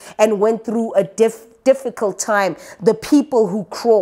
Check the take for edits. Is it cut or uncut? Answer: uncut